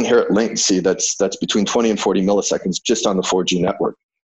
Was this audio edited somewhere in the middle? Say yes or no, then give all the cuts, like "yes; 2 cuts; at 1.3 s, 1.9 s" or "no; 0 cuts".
no; 0 cuts